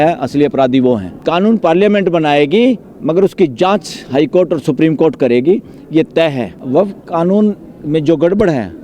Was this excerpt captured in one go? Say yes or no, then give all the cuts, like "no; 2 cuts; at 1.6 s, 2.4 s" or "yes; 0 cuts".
no; 2 cuts; at 1.1 s, 6.5 s